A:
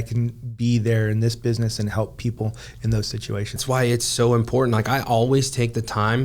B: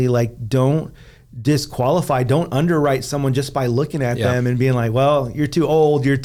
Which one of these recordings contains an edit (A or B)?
A